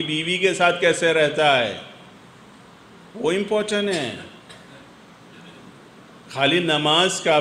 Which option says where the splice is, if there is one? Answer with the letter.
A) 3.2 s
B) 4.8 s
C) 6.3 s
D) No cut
D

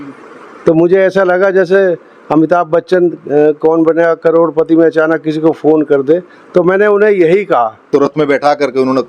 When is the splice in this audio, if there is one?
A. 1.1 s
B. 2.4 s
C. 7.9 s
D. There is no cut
C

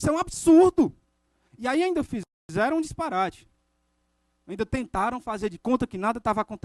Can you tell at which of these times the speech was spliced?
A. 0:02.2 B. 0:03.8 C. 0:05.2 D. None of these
D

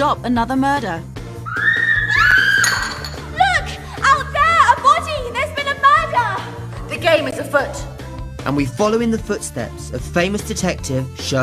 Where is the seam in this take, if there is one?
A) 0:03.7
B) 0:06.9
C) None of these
B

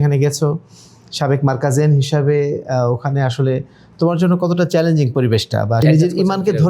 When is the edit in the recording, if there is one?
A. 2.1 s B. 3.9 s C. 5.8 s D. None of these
C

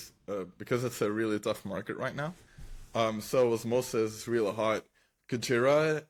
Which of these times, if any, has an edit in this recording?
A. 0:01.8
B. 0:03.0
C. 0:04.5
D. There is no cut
D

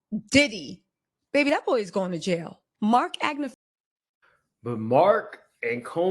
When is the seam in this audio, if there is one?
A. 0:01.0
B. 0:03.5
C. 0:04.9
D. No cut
B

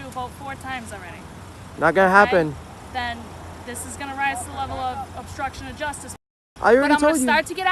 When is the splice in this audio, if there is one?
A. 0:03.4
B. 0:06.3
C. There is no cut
B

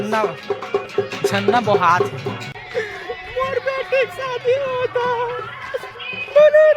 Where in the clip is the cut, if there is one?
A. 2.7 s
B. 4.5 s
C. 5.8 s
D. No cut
A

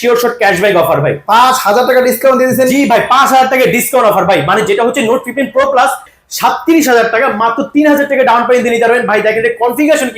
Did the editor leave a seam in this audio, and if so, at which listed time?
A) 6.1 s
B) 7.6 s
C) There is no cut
A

